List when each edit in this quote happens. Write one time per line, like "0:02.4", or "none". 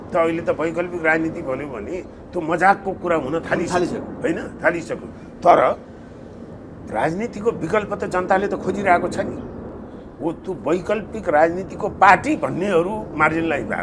none